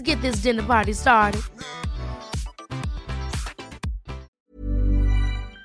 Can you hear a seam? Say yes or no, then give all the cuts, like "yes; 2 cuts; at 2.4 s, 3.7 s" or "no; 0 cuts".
yes; 1 cut; at 4.3 s